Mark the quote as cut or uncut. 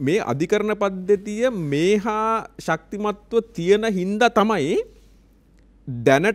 uncut